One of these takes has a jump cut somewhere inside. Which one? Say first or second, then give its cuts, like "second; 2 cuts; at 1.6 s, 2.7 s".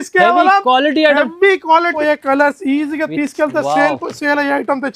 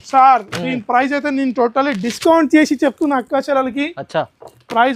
first; 1 cut; at 1.9 s